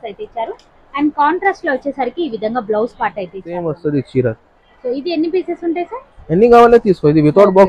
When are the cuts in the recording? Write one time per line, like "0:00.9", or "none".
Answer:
0:03.5